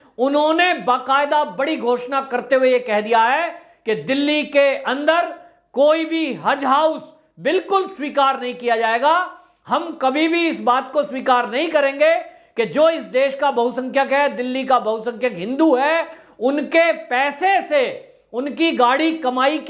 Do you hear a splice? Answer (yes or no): no